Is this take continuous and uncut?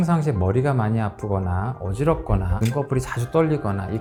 yes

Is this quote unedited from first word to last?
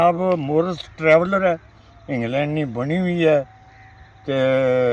yes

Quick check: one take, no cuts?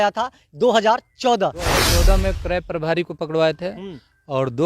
no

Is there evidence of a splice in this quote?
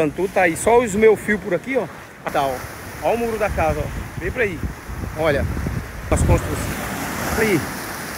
yes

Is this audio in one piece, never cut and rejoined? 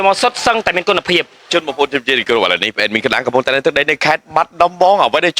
no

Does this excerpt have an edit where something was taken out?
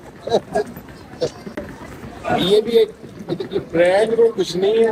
no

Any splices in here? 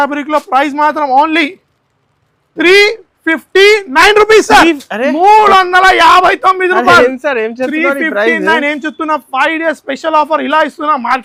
no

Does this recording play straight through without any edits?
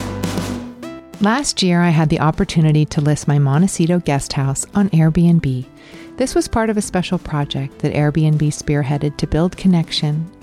no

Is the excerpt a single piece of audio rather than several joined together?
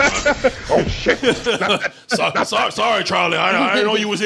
yes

